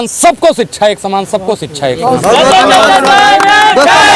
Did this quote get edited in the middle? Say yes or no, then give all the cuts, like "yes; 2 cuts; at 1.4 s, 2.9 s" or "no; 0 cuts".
no; 0 cuts